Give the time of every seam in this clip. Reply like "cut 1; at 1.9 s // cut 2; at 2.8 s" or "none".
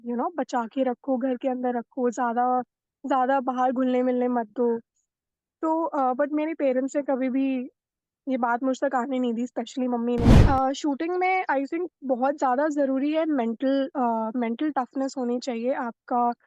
cut 1; at 10.4 s